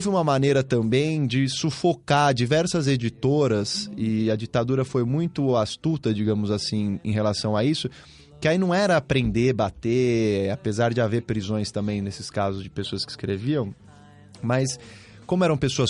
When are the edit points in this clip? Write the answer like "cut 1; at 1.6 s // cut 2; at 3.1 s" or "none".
none